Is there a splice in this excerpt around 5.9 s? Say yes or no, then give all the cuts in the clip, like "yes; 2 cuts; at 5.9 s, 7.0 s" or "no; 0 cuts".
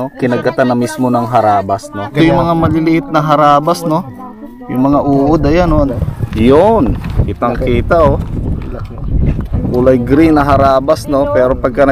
yes; 2 cuts; at 2.1 s, 5.9 s